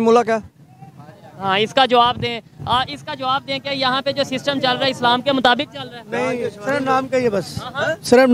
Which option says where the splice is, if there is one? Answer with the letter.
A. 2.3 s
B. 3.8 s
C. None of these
C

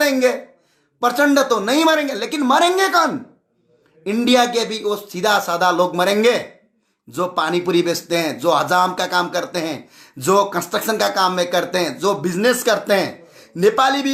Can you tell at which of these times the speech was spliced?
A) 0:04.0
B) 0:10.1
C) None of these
C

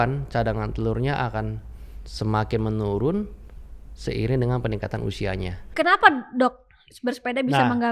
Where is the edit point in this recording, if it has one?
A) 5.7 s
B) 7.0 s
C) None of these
A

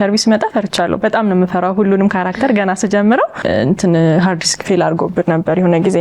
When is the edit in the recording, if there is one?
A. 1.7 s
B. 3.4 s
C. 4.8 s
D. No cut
B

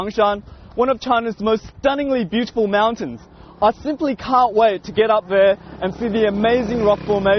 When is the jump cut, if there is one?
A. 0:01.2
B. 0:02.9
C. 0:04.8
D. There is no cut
C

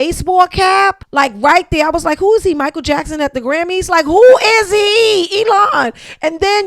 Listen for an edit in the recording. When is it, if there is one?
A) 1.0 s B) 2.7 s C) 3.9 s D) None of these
A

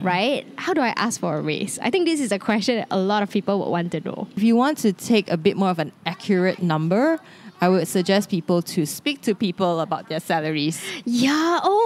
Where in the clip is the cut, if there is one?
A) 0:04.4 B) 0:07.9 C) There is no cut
A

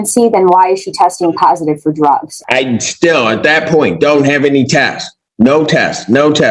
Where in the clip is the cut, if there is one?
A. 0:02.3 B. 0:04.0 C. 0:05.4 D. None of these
A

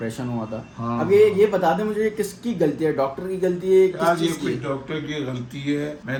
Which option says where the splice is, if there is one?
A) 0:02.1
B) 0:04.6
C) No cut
C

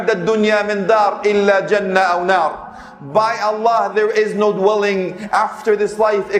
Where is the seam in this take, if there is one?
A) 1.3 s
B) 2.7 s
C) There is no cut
C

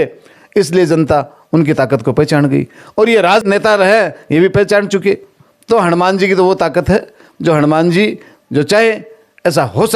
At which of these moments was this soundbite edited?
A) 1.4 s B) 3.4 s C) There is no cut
B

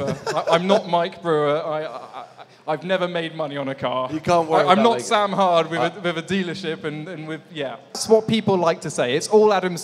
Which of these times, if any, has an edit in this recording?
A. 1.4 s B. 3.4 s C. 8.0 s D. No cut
C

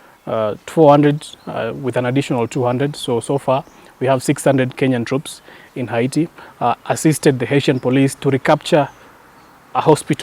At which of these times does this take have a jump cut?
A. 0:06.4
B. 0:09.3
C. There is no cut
A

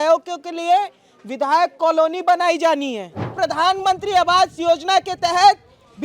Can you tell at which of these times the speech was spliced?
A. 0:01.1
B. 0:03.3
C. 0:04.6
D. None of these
B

